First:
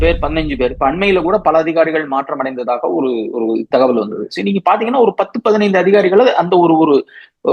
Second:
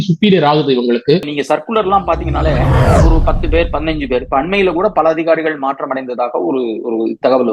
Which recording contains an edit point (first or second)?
second